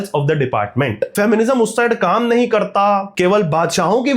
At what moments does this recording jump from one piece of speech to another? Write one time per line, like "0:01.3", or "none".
0:01.1
0:03.1

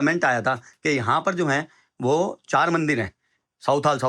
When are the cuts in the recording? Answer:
none

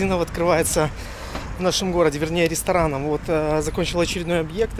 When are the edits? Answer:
none

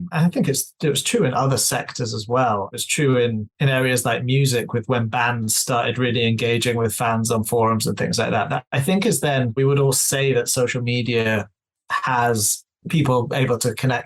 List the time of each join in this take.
none

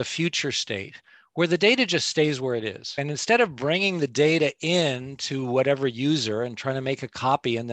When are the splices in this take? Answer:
none

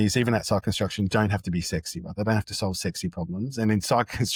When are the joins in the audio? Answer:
none

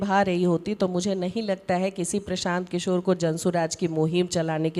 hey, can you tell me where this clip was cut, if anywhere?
none

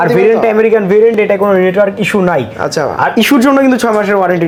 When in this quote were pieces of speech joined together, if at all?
none

